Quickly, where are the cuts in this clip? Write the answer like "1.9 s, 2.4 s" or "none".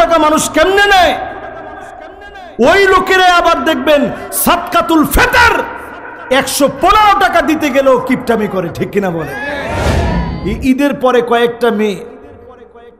10.2 s